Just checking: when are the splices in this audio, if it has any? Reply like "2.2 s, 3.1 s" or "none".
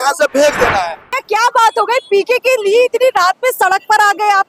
1.2 s

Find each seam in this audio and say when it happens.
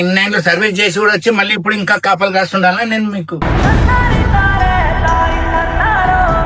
none

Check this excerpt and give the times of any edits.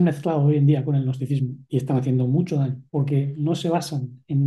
1.6 s, 2.8 s

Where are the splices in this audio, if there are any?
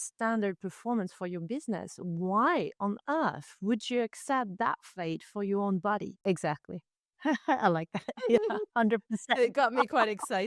6.1 s

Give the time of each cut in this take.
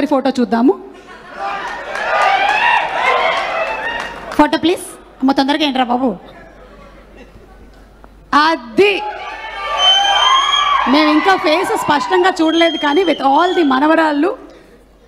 none

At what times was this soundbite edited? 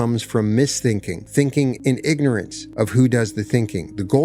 1.2 s, 1.8 s, 2.6 s

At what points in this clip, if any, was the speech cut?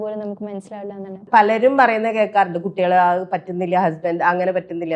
1.2 s

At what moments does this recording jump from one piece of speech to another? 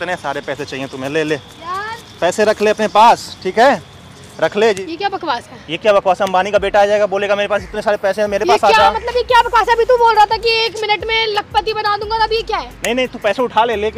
4.8 s

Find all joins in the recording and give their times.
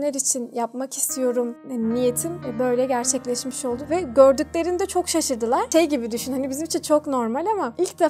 3.8 s

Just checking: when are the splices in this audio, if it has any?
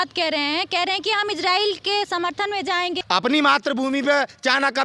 3.0 s

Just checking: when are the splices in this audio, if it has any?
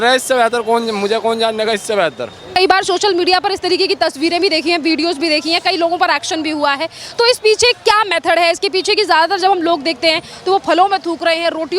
none

